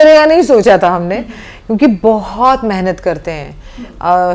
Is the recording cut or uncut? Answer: uncut